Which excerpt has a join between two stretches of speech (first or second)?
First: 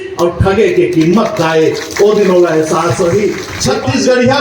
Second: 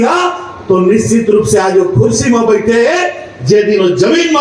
first